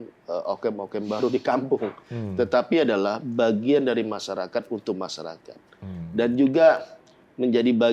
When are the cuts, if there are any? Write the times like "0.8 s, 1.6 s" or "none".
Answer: none